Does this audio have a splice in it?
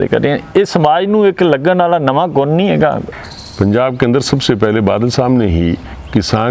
yes; 1 cut; at 3.1 s

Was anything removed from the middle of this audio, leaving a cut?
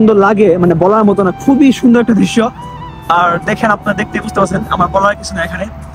no; 0 cuts

